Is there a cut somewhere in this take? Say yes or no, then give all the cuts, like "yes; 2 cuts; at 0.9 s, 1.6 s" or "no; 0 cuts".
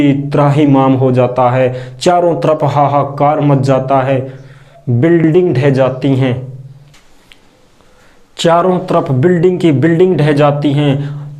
no; 0 cuts